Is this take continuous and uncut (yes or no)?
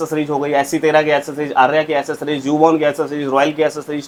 yes